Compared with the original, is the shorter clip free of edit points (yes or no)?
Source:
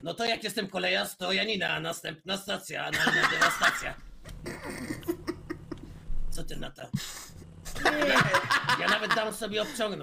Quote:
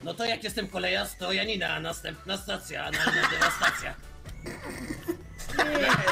no